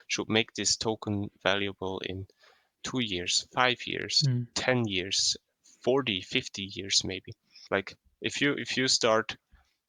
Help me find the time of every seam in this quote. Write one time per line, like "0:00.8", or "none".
0:01.4
0:07.6